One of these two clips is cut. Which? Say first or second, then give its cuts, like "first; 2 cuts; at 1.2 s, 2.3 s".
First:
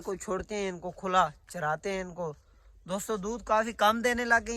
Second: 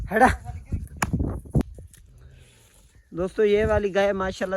second; 1 cut; at 1.6 s